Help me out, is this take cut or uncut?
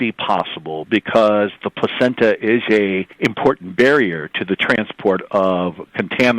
cut